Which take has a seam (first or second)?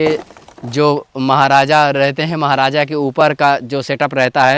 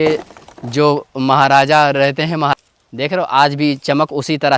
second